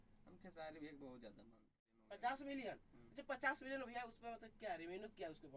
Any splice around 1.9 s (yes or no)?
yes